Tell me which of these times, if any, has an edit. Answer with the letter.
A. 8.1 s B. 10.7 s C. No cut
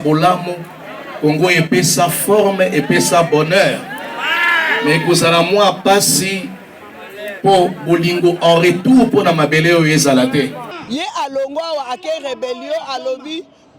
B